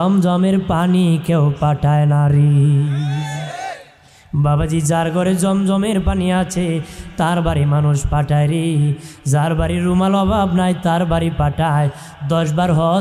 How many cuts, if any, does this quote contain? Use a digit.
0